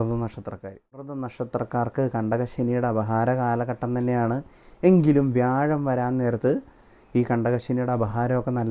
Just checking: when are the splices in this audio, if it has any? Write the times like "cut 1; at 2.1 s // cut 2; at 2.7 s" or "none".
cut 1; at 1.1 s